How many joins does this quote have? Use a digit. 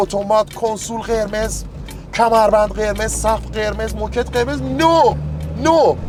0